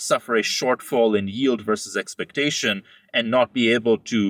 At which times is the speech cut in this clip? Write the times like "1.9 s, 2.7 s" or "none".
none